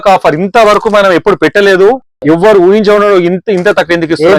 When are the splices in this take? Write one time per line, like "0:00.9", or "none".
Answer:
none